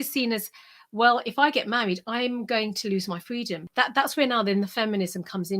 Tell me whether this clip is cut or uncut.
cut